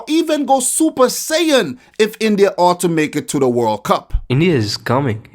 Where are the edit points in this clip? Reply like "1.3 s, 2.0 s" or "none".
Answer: 4.2 s